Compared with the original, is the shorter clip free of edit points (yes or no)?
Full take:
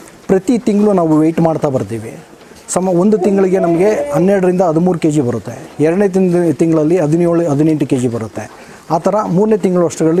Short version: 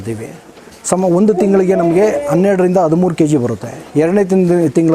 yes